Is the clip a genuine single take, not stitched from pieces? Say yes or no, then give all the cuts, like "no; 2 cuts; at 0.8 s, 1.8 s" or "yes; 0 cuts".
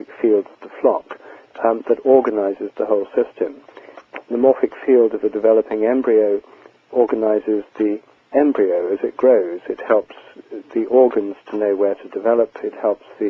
no; 1 cut; at 4.7 s